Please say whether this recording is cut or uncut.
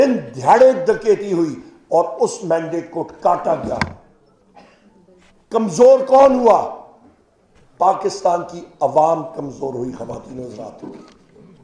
uncut